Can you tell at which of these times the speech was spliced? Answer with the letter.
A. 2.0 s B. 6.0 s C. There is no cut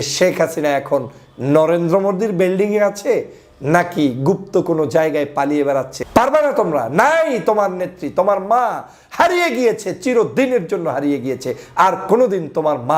B